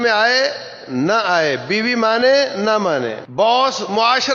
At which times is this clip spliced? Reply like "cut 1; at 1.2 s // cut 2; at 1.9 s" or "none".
cut 1; at 3.2 s

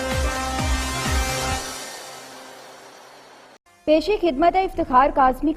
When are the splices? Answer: cut 1; at 3.6 s

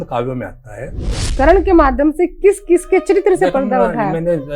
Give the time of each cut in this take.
cut 1; at 1.2 s

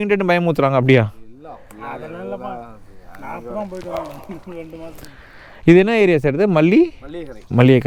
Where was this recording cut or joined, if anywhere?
none

